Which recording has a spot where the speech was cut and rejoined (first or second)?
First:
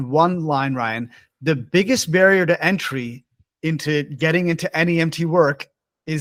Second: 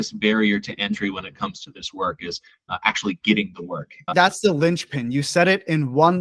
second